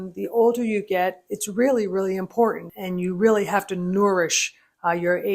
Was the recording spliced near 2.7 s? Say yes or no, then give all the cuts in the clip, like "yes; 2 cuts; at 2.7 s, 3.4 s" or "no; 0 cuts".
yes; 1 cut; at 2.7 s